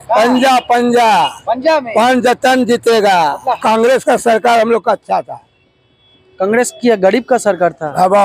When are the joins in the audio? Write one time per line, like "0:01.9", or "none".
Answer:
0:03.6